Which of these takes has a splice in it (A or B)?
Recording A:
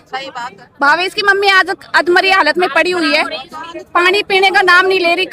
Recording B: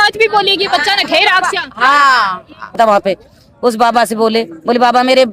B